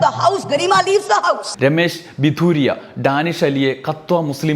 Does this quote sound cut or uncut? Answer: cut